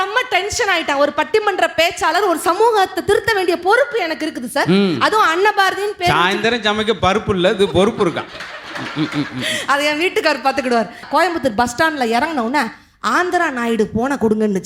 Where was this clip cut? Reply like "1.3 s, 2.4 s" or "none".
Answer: 11.1 s